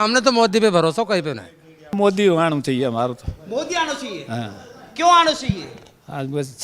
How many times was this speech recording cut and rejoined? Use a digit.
1